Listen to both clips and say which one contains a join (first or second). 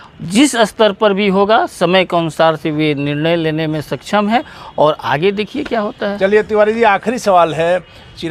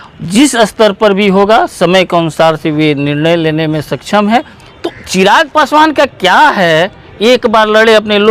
second